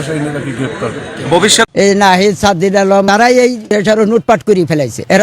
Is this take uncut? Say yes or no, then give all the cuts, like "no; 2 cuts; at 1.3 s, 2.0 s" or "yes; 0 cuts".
no; 1 cut; at 1.7 s